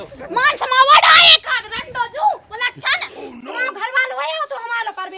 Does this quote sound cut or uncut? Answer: cut